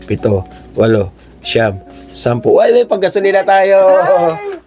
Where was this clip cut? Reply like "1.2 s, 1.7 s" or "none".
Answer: none